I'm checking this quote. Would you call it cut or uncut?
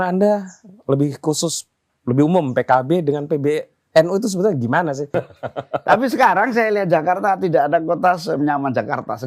cut